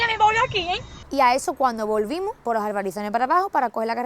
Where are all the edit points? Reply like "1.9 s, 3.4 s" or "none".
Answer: 0.9 s, 2.4 s